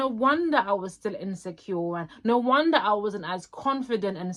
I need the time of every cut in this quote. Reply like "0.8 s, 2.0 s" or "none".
none